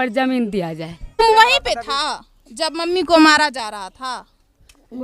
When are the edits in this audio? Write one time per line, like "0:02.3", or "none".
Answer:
0:01.2